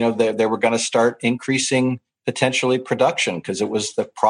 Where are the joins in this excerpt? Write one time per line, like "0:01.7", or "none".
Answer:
none